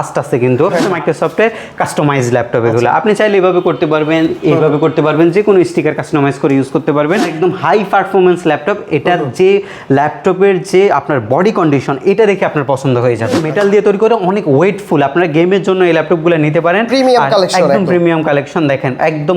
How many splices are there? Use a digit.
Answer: 3